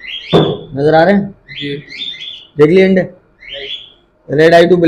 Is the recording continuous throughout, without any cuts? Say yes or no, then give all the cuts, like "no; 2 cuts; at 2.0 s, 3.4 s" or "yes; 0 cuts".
yes; 0 cuts